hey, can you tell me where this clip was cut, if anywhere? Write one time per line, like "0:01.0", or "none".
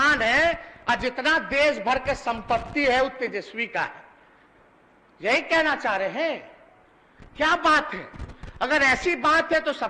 none